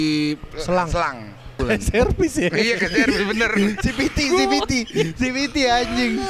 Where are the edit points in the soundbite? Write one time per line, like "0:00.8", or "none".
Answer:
0:01.5

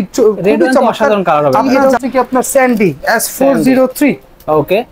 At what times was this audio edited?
0:01.8

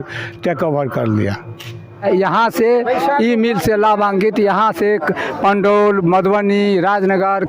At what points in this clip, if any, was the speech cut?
0:02.0

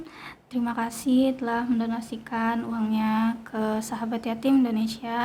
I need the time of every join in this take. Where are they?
none

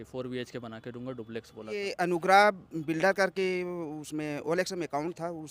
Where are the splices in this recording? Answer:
0:01.8

